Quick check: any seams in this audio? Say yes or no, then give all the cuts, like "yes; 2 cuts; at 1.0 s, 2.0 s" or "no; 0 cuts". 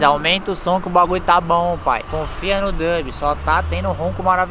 yes; 1 cut; at 2.1 s